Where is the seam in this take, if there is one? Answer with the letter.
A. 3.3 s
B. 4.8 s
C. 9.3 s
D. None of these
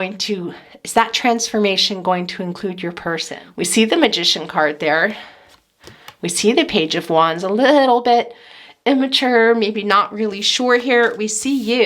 A